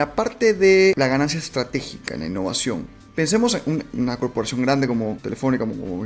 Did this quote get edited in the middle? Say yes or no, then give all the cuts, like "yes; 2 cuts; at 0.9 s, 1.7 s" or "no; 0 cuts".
yes; 3 cuts; at 1.0 s, 3.0 s, 5.2 s